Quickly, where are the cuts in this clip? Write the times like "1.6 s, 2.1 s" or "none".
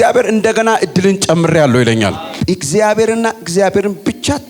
2.4 s

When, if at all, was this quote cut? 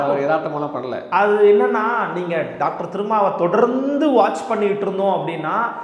none

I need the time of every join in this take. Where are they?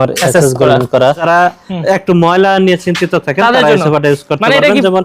1.2 s

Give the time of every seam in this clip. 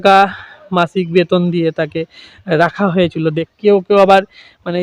3.5 s

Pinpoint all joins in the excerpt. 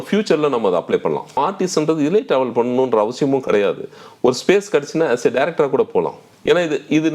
1.4 s, 6.2 s

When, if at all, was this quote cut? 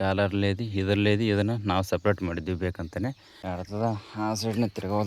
3.4 s

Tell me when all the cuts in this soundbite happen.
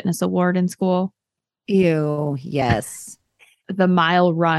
3.7 s

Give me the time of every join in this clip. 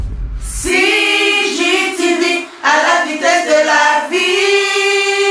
none

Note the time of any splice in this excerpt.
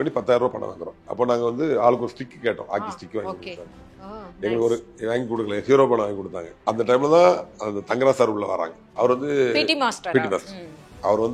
1.0 s, 6.6 s, 8.8 s

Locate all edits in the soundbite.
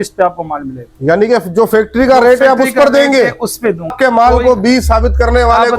3.9 s

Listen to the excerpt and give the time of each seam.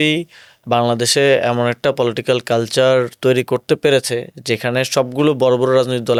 none

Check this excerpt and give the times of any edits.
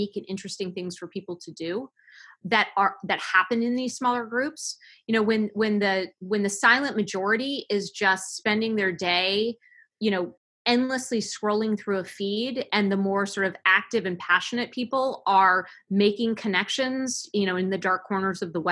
10.5 s

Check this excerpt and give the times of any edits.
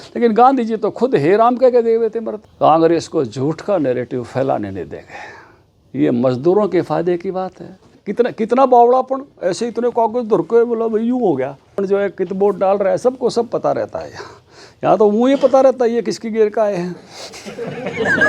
2.4 s, 8.0 s, 11.8 s

